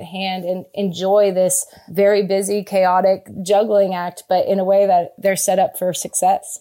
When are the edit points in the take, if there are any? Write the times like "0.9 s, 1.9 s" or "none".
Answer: 5.1 s